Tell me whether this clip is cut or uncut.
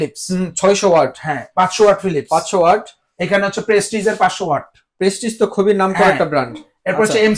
uncut